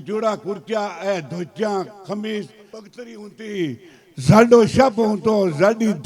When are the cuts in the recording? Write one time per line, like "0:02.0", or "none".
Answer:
0:02.6